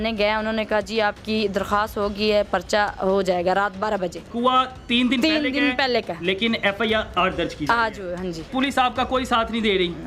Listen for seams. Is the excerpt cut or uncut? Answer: cut